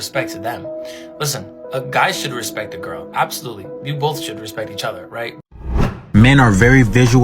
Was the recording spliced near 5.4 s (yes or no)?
yes